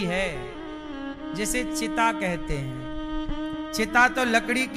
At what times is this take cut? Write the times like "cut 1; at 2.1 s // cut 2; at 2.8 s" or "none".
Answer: none